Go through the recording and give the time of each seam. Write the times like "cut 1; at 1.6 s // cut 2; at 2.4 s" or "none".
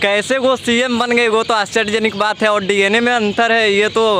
none